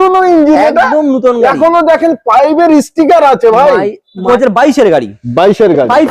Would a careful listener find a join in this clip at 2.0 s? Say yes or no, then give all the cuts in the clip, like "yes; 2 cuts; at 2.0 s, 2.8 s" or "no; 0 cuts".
no; 1 cut; at 4.2 s